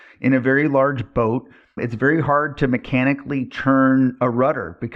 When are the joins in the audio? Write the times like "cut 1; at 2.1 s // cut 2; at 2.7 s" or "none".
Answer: cut 1; at 1.8 s

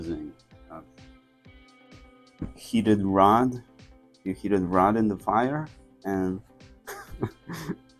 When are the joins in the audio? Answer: none

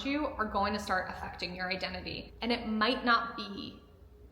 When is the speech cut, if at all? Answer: cut 1; at 2.3 s

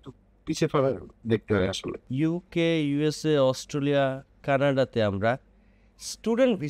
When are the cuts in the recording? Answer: cut 1; at 2.0 s

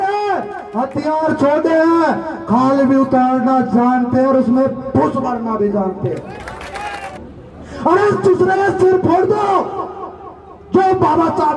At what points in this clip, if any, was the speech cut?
cut 1; at 7.0 s

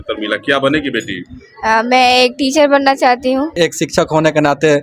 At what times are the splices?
cut 1; at 3.5 s

